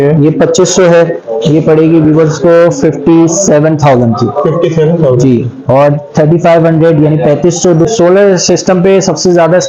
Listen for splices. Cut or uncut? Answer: cut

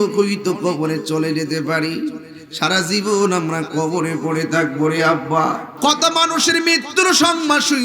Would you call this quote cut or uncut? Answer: cut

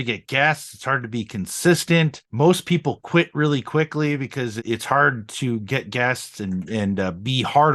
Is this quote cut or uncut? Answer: cut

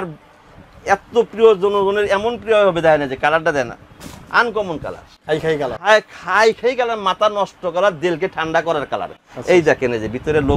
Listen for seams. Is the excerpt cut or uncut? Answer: uncut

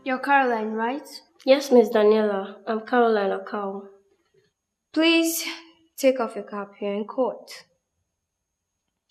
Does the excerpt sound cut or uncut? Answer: uncut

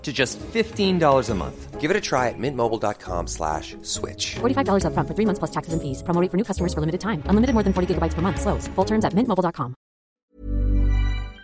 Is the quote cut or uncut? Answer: cut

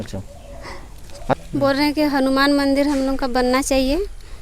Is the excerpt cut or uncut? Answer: cut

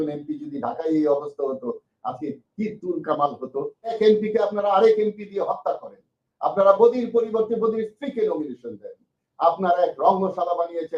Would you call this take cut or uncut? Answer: cut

